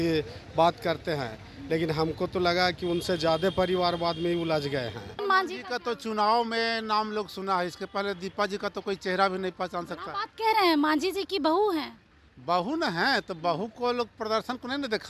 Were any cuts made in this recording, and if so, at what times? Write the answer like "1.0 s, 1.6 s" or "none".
5.2 s

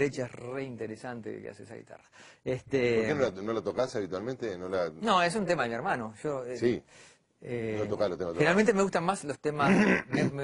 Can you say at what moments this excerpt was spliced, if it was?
8.6 s

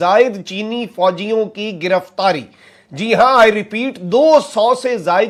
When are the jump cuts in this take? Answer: none

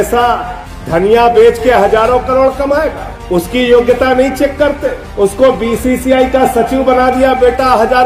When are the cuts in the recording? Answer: none

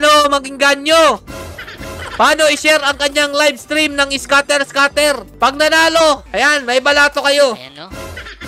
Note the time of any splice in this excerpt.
none

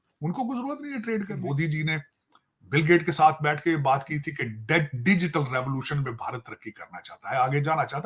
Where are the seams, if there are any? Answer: 1.4 s

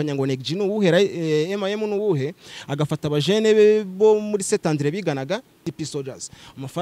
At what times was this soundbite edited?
5.7 s

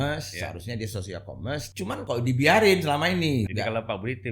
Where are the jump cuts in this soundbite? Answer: 1.9 s, 3.5 s

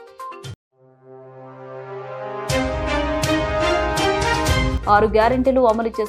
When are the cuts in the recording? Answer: 4.7 s

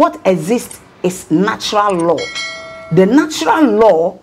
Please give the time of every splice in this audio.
2.7 s

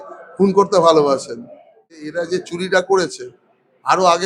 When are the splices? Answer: 1.8 s

